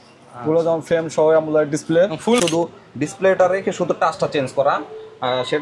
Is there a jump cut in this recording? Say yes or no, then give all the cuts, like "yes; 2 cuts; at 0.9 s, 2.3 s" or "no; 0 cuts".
yes; 1 cut; at 2.4 s